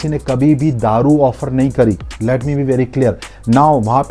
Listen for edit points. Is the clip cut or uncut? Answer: uncut